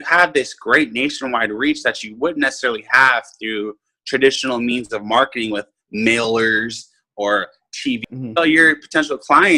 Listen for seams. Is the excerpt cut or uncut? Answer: cut